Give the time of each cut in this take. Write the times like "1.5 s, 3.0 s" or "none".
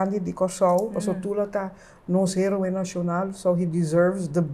none